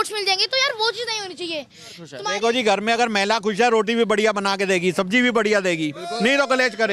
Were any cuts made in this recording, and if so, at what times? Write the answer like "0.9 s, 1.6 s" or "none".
2.2 s

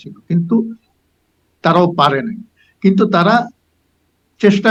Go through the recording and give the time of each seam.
none

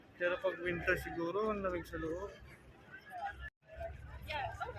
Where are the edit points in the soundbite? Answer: 3.6 s

